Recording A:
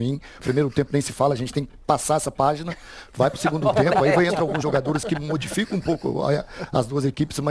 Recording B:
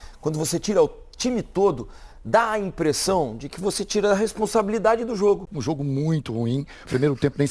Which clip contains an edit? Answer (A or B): B